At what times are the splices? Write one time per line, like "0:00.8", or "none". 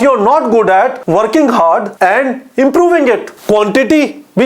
0:01.0
0:01.9
0:03.3